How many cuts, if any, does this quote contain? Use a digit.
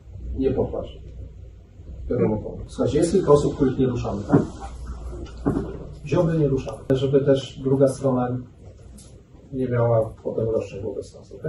2